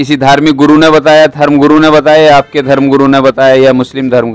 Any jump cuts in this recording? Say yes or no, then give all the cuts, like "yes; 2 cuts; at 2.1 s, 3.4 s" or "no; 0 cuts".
no; 0 cuts